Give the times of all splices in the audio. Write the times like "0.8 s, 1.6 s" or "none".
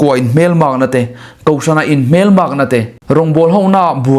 2.9 s